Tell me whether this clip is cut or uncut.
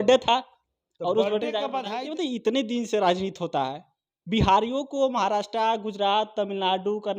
cut